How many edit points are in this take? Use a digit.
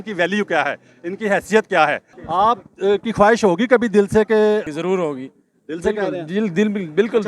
2